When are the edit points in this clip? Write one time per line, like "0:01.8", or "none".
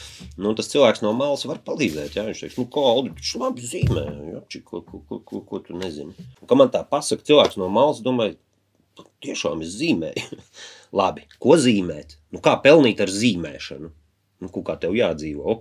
0:06.3